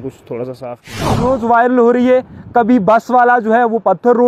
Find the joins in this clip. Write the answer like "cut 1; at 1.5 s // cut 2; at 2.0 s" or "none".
cut 1; at 1.2 s